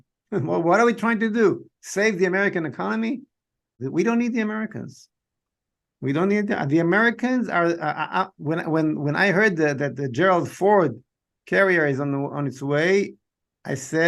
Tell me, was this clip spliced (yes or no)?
yes